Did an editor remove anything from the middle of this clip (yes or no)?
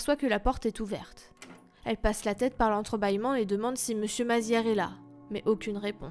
yes